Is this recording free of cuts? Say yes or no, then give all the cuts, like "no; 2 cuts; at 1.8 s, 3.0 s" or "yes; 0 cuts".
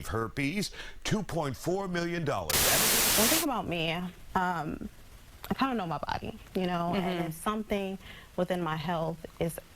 no; 1 cut; at 2.9 s